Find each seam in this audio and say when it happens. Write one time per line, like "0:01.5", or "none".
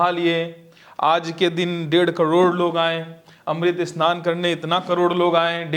none

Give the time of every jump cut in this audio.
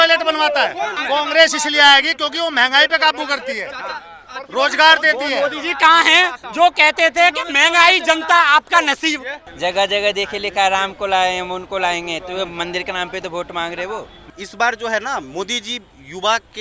0:01.0
0:09.4
0:14.2

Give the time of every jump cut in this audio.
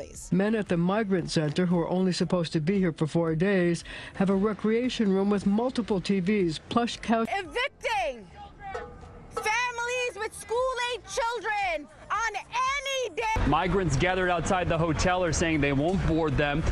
none

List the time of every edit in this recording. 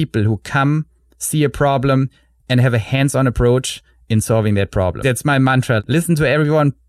0:05.0
0:05.8

